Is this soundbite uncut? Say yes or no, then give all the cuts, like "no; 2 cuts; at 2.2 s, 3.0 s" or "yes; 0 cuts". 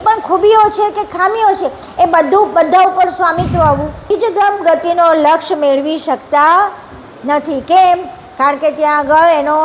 no; 1 cut; at 4.1 s